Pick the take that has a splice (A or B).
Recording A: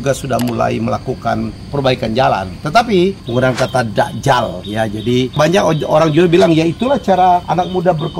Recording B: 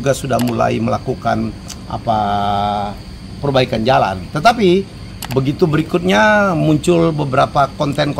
A